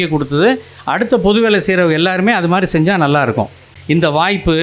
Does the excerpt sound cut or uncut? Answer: cut